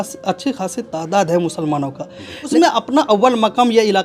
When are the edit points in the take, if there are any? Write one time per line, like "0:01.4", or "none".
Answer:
0:02.5